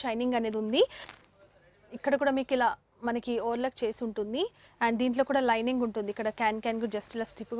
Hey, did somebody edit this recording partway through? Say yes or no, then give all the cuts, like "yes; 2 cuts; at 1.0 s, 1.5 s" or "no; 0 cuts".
yes; 1 cut; at 1.0 s